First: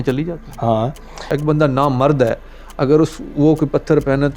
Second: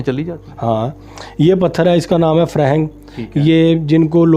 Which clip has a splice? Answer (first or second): first